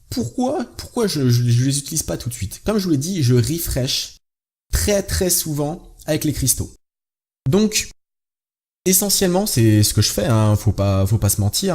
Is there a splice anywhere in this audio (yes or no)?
yes